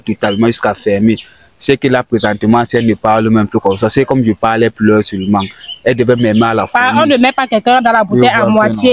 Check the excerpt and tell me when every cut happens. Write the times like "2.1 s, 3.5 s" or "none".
none

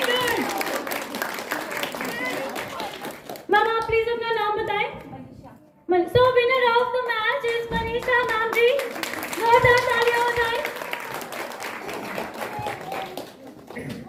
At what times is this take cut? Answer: none

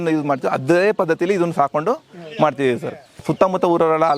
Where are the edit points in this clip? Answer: 3.2 s

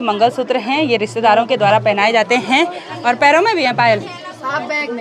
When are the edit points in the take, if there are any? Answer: none

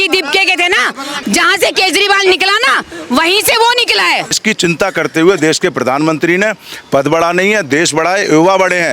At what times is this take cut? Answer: 1.1 s, 4.4 s

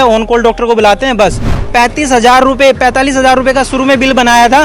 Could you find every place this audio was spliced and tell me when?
1.5 s

